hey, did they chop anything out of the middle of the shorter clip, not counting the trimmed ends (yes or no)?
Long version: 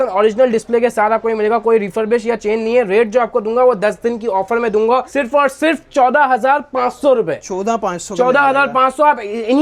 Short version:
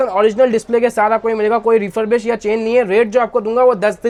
no